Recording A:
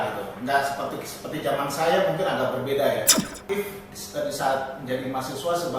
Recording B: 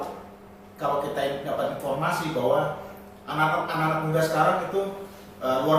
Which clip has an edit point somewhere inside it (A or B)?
A